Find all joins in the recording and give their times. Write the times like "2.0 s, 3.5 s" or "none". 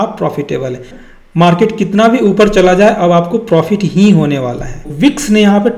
0.9 s, 4.9 s

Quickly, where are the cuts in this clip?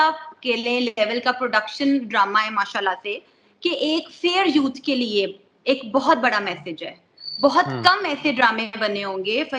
none

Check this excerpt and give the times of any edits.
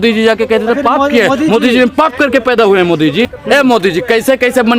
3.2 s

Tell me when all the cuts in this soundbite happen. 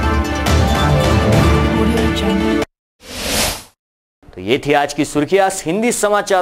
none

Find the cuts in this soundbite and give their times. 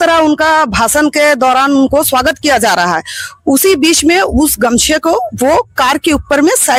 none

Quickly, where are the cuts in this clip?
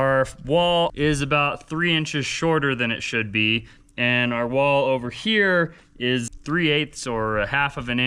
0.9 s, 6.3 s

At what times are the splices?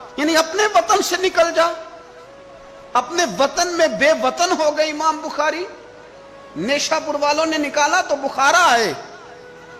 none

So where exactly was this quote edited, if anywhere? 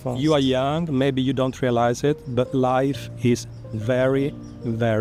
none

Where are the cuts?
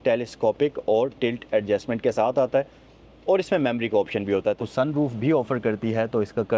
4.6 s

